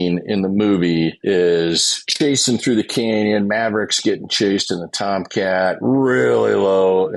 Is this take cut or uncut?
cut